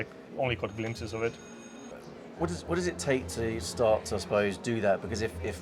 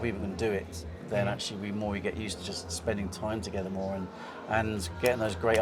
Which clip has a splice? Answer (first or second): first